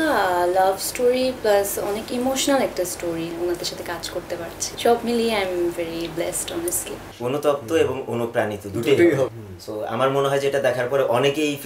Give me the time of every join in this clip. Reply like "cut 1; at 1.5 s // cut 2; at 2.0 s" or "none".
cut 1; at 3.3 s // cut 2; at 7.0 s // cut 3; at 9.5 s